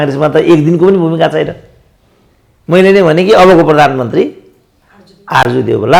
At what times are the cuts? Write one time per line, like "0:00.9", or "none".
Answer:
none